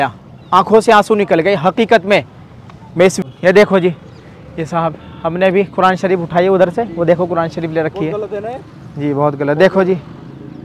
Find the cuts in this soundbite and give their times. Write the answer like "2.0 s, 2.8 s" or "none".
3.2 s